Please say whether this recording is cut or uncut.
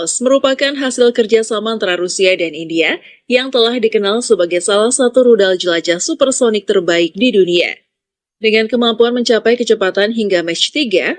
uncut